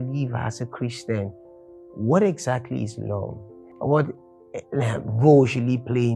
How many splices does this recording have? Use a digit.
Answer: 0